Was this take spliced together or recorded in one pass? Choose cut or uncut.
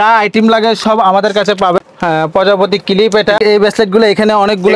cut